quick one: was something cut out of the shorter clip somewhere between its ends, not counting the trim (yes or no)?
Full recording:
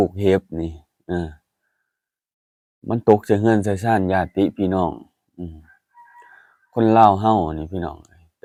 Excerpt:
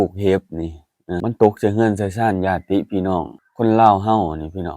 yes